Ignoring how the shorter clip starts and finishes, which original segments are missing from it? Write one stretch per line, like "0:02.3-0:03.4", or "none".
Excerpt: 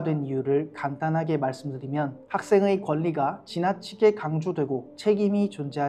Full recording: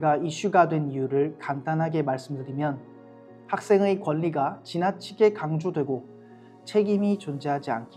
0:02.8-0:03.4
0:06.1-0:06.6